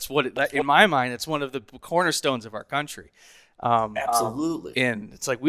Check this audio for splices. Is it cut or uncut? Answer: uncut